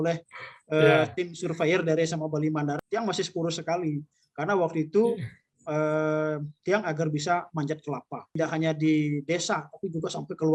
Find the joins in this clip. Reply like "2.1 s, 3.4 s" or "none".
2.8 s, 8.3 s